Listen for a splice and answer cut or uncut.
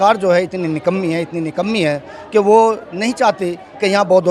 uncut